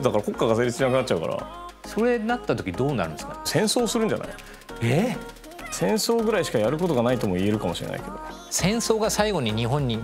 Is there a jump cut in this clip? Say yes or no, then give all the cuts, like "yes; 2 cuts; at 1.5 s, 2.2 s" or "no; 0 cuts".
yes; 3 cuts; at 1.6 s, 3.5 s, 5.7 s